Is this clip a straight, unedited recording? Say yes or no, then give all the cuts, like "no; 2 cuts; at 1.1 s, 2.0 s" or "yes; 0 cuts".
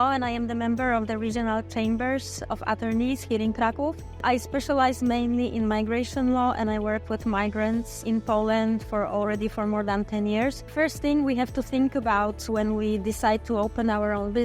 no; 3 cuts; at 4.2 s, 8.0 s, 10.7 s